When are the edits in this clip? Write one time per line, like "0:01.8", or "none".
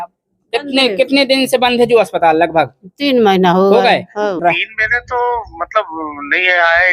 0:04.4